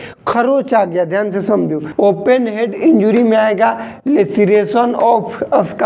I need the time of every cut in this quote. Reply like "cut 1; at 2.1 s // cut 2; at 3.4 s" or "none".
cut 1; at 1.8 s